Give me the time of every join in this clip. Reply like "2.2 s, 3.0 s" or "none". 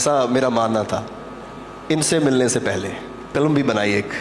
3.3 s